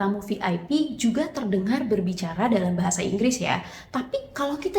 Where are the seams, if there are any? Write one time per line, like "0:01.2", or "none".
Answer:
0:03.8